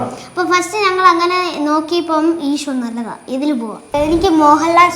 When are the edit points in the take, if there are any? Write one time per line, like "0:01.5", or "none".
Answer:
0:03.9